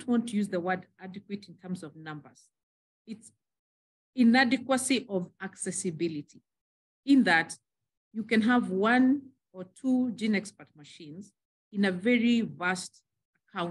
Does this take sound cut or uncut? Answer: uncut